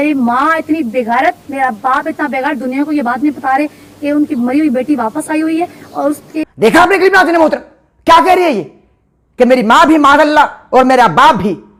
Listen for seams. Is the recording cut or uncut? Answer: uncut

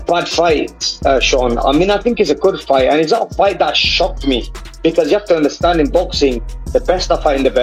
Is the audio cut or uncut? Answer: uncut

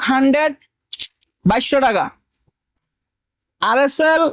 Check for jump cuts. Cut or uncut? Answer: uncut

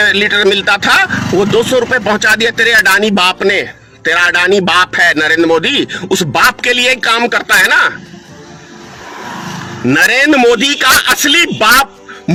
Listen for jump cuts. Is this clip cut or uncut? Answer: uncut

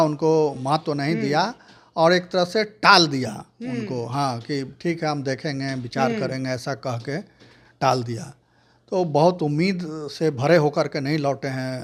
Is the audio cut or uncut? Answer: uncut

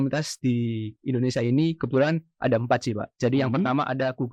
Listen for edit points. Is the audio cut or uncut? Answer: uncut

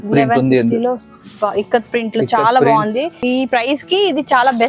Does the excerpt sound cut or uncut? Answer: cut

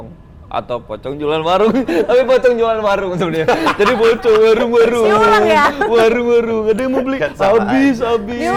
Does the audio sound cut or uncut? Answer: uncut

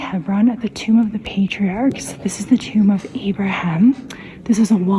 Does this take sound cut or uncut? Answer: cut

